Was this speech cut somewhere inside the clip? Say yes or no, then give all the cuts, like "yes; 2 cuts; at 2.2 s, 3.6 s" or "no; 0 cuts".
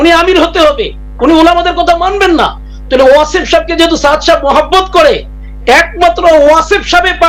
no; 0 cuts